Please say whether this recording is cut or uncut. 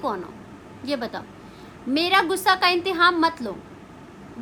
uncut